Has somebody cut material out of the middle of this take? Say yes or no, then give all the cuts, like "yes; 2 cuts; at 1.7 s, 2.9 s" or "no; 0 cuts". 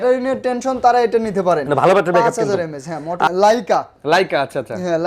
yes; 1 cut; at 3.3 s